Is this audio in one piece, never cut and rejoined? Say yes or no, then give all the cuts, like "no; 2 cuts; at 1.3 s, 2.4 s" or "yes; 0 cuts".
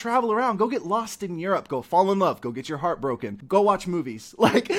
no; 1 cut; at 3.3 s